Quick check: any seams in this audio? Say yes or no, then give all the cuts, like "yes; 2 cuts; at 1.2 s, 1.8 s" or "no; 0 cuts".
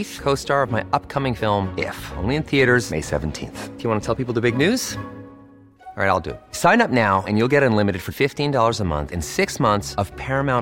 no; 0 cuts